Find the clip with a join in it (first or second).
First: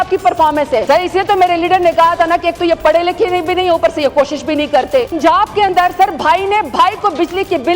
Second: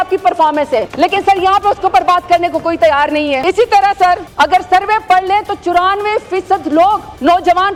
first